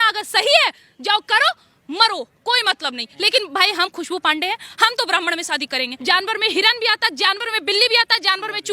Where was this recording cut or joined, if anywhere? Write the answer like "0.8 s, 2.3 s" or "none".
5.9 s